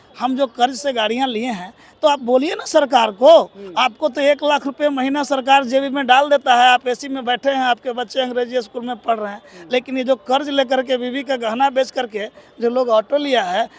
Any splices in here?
no; 0 cuts

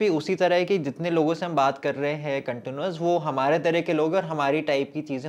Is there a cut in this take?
no; 0 cuts

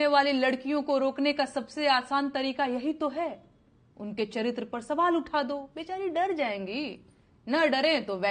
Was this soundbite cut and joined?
no; 0 cuts

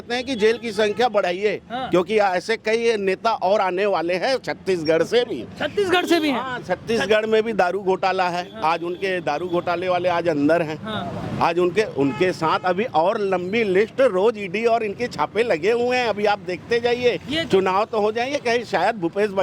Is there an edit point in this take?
no; 0 cuts

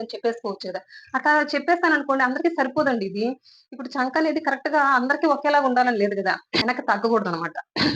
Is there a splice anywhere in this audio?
yes; 1 cut; at 6.6 s

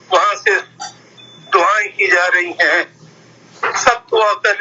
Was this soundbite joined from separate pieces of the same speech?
yes; 1 cut; at 1.9 s

